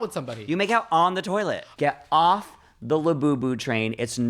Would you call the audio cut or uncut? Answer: cut